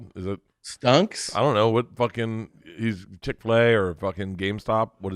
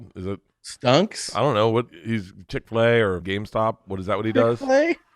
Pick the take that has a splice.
second; 2 cuts; at 1.9 s, 3.2 s

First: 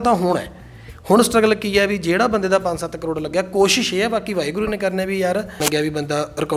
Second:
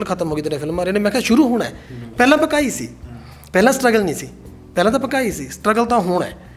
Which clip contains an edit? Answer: first; 1 cut; at 5.6 s

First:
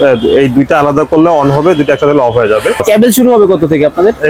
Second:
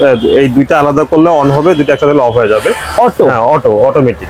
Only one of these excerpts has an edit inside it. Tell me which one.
first; 1 cut; at 2.8 s

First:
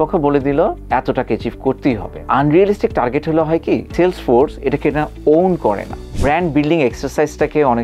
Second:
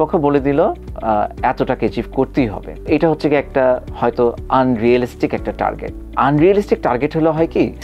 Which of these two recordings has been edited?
first; 3 cuts; at 0.8 s, 2.1 s, 6.0 s

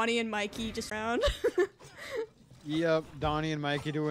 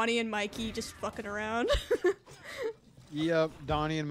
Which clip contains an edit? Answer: first; 1 cut; at 0.9 s

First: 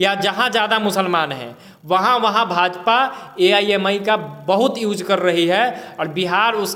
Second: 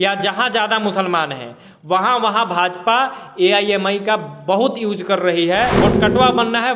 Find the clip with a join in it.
second; 1 cut; at 5.7 s

